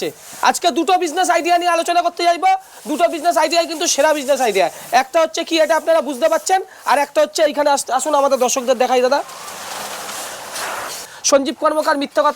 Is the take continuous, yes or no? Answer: no